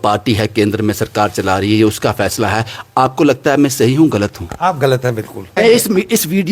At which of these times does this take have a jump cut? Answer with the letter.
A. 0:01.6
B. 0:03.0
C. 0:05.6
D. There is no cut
C